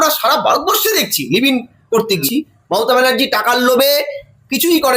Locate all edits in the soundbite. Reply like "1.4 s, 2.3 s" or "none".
2.2 s